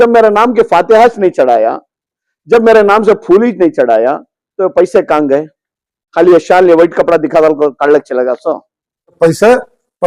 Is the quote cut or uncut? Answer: cut